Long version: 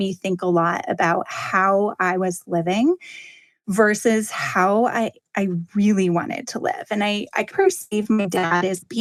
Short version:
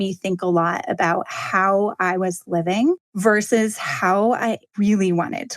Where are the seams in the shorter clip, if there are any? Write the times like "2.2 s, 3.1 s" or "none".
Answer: 3.1 s, 4.7 s